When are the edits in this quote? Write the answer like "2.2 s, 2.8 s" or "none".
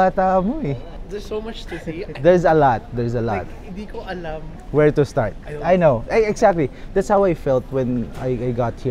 0.9 s, 4.5 s